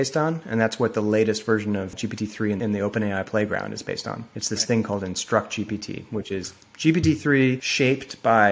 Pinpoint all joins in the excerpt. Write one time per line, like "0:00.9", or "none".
0:02.4
0:04.3
0:07.7